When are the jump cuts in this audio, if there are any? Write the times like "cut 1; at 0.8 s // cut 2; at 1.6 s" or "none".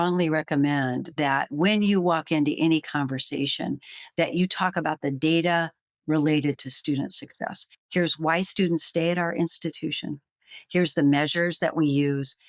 none